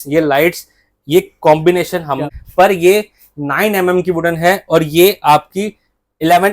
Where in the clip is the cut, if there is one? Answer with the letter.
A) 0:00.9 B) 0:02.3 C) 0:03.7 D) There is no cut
B